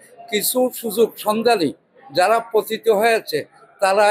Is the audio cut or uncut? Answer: uncut